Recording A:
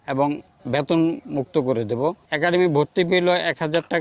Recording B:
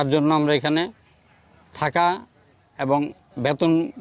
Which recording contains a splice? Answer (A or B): A